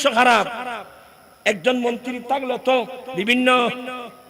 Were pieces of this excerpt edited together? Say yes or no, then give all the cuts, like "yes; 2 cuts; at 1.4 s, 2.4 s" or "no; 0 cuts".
yes; 1 cut; at 3.0 s